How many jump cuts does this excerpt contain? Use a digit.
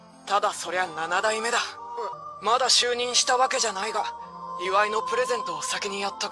1